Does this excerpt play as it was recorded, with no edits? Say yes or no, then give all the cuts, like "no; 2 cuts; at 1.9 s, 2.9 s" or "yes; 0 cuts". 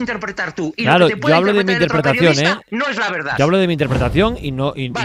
yes; 0 cuts